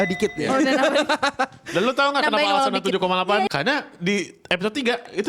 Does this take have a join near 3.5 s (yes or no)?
yes